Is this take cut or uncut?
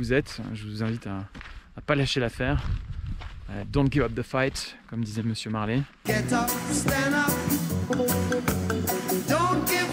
uncut